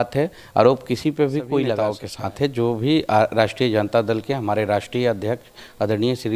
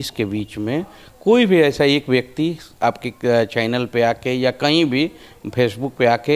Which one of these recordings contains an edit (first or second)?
first